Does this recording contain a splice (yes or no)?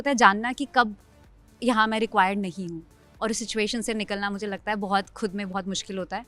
no